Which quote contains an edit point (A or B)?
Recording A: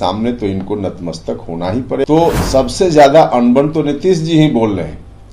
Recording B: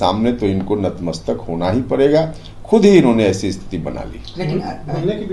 A